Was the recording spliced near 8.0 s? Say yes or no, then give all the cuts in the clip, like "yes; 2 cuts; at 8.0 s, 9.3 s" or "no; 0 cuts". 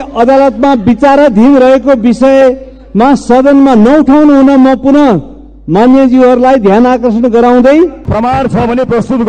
yes; 1 cut; at 8.0 s